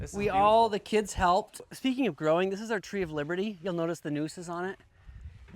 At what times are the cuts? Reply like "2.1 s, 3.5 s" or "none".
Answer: 1.7 s